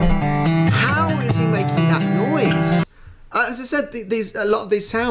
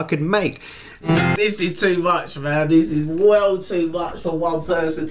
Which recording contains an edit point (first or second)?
second